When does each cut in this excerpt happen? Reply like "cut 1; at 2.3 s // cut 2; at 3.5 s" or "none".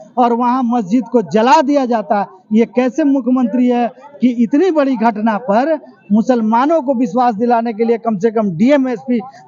none

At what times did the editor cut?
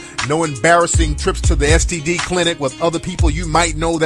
cut 1; at 2.2 s

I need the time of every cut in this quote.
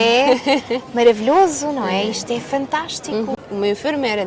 cut 1; at 3.3 s

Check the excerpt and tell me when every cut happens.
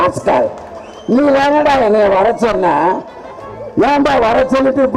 none

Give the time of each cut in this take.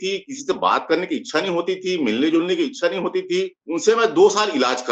cut 1; at 3.6 s

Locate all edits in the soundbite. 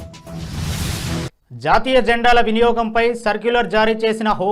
cut 1; at 1.3 s

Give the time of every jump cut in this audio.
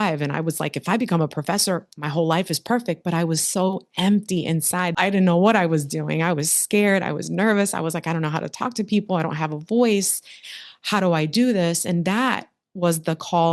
cut 1; at 4.9 s

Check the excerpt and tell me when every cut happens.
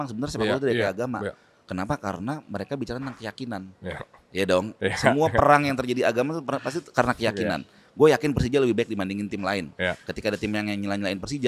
none

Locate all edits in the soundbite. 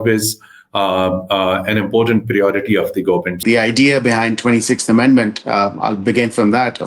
cut 1; at 3.4 s

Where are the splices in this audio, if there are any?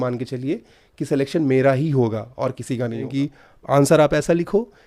cut 1; at 3.1 s

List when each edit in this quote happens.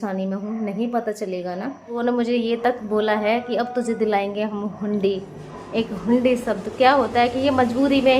cut 1; at 2.0 s

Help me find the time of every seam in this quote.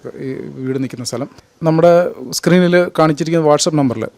cut 1; at 1.4 s

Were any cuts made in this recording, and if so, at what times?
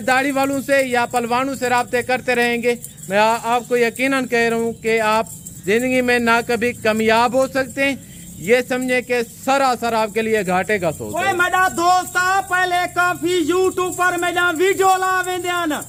none

